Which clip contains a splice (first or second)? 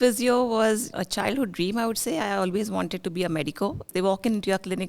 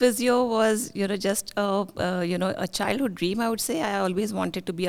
first